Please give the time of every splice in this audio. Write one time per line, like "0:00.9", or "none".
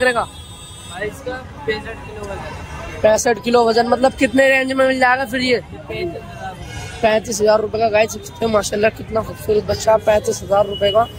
none